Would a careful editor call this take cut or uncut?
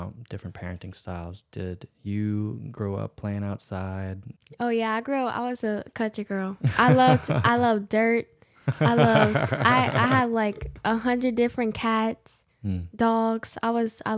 cut